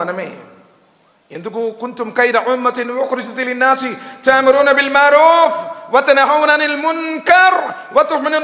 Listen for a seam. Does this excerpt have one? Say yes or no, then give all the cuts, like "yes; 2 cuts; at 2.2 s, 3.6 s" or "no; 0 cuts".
no; 0 cuts